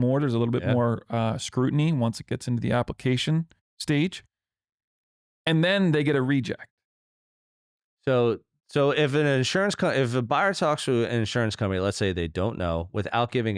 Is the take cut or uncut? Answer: uncut